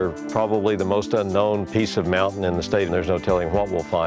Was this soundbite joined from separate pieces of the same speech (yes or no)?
yes